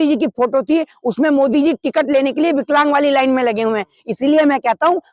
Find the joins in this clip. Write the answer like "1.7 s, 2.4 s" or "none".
none